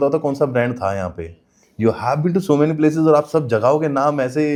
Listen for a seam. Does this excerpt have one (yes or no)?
no